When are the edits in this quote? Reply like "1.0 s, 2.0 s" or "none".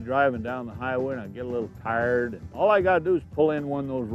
2.4 s